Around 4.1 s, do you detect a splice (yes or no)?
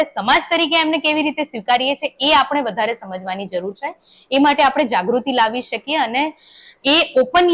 no